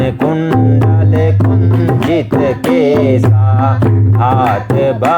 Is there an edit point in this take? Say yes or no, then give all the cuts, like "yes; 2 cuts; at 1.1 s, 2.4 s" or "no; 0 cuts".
no; 0 cuts